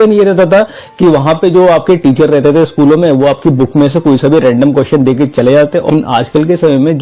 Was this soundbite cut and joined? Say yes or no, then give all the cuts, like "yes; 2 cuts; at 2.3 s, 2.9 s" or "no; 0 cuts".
yes; 1 cut; at 5.9 s